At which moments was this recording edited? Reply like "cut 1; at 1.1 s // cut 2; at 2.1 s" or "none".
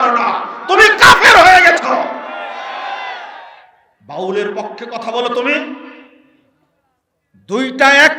none